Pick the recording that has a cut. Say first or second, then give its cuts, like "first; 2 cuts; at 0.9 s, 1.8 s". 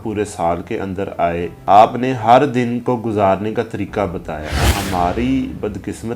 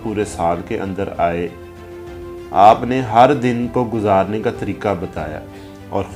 first; 2 cuts; at 1.6 s, 4.6 s